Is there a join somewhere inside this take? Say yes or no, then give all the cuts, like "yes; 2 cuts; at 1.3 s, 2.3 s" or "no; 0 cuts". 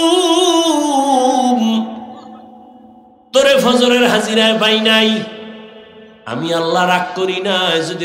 no; 0 cuts